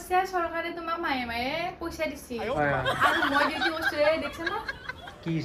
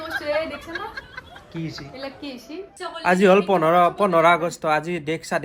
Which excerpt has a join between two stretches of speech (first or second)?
second